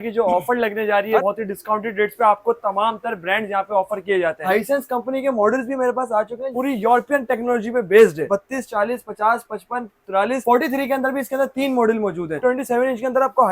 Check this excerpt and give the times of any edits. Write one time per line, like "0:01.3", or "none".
0:01.2
0:04.5
0:08.2
0:12.4